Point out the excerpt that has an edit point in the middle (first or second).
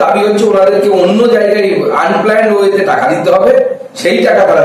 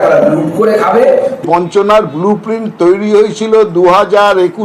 second